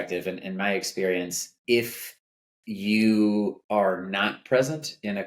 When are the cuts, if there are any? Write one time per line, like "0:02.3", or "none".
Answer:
0:01.5
0:03.6